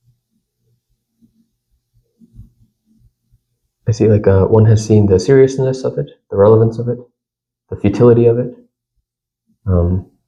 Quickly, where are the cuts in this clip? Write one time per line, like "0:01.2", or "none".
none

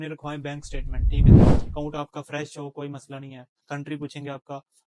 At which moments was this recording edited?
0:03.5

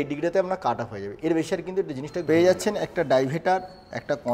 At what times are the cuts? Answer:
0:02.1

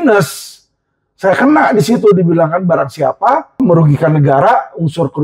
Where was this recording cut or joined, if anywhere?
0:03.6

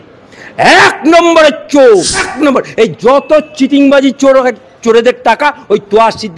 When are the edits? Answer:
0:02.3

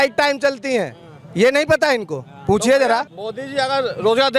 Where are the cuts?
0:03.1

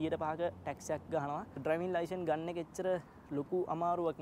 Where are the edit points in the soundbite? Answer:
0:01.5

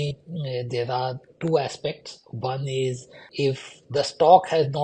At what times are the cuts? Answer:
0:03.2

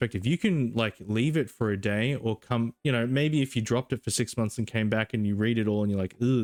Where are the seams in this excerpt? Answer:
none

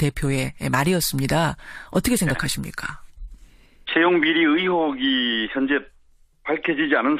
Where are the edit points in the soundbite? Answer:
0:01.8

